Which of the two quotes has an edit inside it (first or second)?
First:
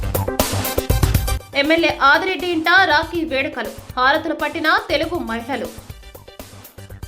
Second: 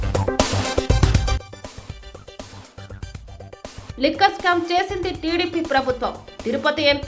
second